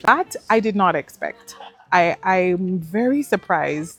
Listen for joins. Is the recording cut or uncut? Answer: uncut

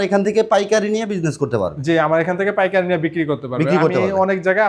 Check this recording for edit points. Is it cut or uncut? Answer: uncut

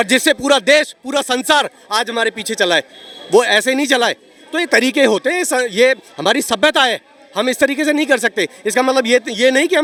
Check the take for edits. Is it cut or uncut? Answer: uncut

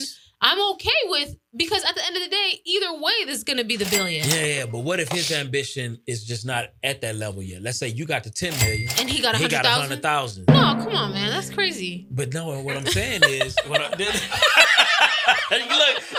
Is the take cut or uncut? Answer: uncut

